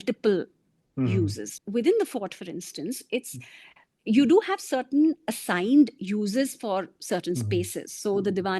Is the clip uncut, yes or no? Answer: no